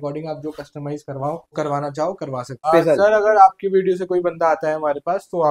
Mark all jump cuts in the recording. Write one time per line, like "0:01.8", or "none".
0:01.5
0:02.6